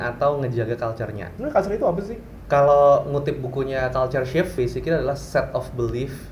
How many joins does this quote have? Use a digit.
3